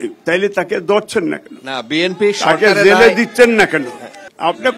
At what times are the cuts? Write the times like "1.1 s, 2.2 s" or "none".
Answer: none